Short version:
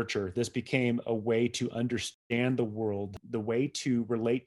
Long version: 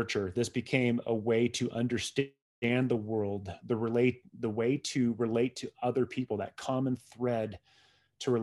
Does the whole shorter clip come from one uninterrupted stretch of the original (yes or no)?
no